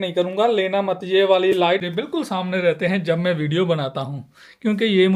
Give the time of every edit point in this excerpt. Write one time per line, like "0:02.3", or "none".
0:01.8